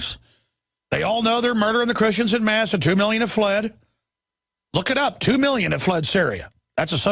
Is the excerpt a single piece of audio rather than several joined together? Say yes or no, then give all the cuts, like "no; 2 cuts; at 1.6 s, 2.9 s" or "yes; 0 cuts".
yes; 0 cuts